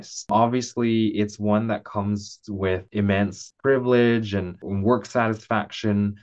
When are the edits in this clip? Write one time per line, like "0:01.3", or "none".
0:02.9